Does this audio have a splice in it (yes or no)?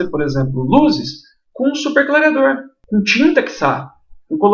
yes